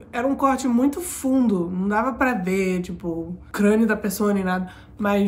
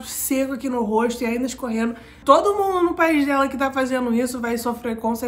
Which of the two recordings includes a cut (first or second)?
second